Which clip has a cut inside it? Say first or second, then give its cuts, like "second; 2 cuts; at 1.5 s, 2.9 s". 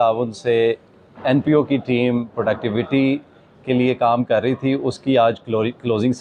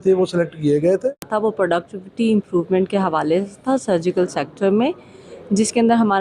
second; 1 cut; at 1.3 s